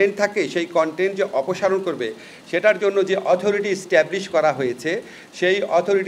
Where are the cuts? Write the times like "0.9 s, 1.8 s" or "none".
none